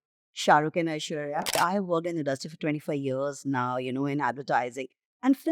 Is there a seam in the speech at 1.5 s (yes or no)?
yes